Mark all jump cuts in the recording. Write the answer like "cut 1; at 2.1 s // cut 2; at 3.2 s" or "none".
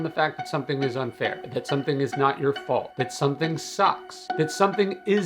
cut 1; at 1.4 s // cut 2; at 2.9 s